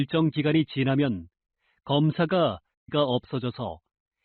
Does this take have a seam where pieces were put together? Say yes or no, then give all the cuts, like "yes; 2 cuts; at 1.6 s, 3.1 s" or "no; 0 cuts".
yes; 1 cut; at 2.9 s